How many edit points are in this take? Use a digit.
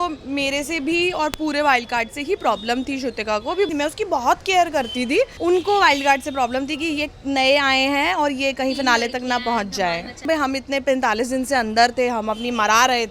3